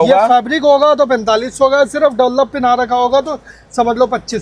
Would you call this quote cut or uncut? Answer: uncut